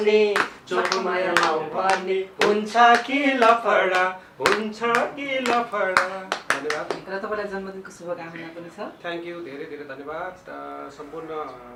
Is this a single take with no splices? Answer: yes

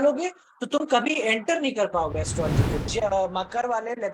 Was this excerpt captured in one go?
no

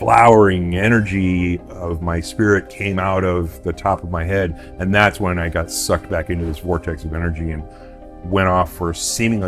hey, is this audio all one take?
yes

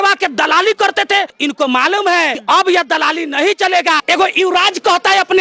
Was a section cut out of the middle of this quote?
yes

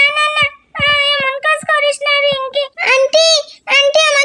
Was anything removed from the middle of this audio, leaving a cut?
yes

